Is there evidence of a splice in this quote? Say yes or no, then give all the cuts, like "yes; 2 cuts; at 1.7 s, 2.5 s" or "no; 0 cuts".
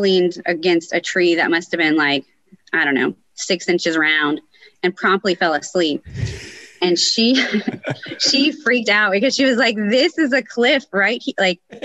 no; 0 cuts